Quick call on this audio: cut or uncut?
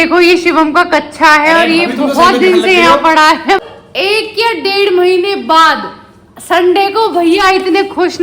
cut